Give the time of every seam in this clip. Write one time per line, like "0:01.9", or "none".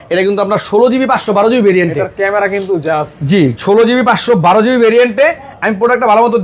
none